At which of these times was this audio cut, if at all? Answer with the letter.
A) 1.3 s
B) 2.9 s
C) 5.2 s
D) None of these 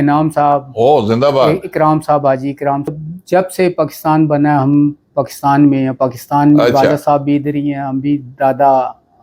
B